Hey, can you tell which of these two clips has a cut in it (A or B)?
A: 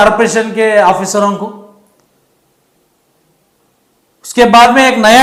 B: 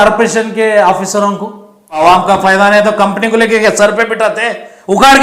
B